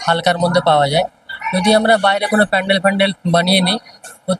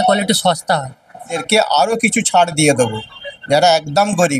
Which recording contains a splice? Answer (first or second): second